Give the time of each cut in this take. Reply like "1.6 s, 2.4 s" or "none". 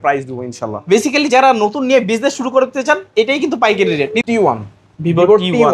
4.2 s